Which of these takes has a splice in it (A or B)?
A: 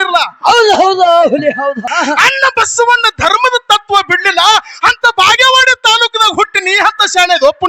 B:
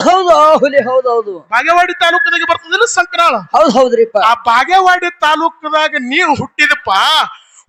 A